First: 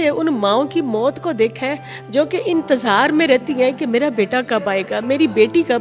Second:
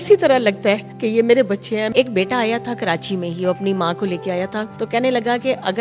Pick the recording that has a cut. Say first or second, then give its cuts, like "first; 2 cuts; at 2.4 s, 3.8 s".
second; 3 cuts; at 0.9 s, 1.9 s, 4.7 s